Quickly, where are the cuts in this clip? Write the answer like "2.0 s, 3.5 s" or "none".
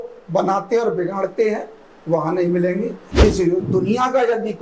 3.0 s